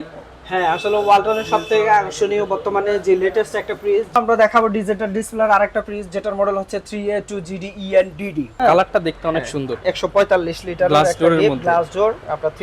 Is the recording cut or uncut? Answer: cut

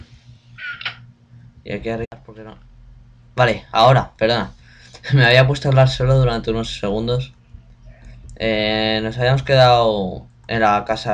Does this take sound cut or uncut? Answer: uncut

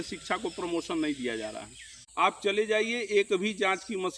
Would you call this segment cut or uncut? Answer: cut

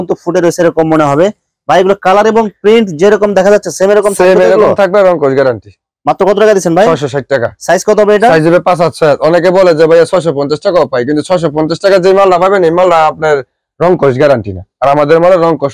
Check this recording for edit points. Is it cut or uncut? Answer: uncut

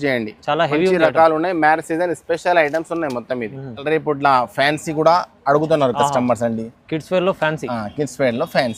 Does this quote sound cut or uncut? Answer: cut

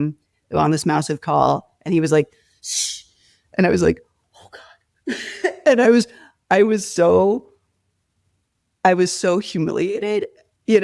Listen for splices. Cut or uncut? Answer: uncut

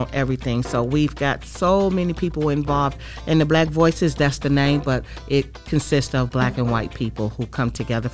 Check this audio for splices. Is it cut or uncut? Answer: uncut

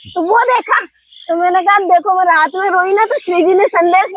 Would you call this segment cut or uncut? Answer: uncut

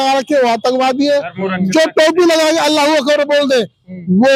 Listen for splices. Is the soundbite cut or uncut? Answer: uncut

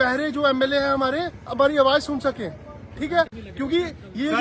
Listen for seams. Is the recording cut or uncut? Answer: uncut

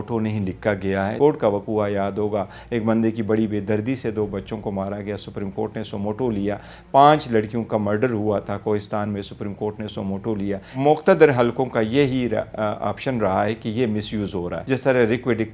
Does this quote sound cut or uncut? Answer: cut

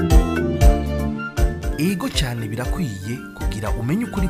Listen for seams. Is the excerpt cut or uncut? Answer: cut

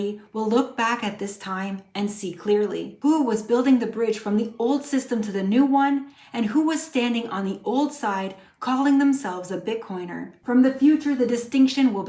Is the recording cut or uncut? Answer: cut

